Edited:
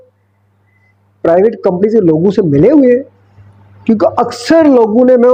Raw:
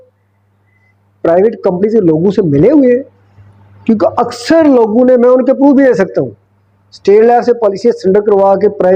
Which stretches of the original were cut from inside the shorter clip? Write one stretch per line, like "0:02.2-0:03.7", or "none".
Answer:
none